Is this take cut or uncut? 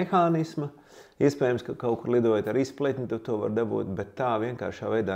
uncut